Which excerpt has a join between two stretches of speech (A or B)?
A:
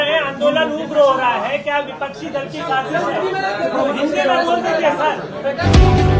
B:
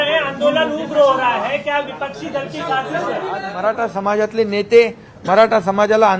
B